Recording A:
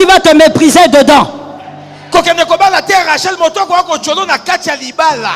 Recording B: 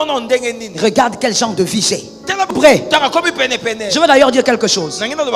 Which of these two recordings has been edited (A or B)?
B